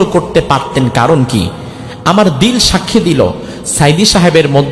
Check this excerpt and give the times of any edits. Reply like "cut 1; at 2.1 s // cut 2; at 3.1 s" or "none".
none